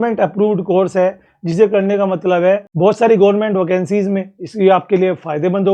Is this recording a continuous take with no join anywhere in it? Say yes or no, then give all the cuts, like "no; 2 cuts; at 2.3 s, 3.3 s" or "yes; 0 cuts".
no; 1 cut; at 2.7 s